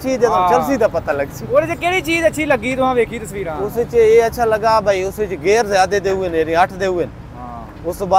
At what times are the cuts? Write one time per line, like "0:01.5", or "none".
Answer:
none